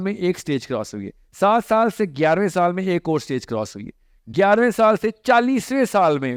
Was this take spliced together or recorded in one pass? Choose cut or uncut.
uncut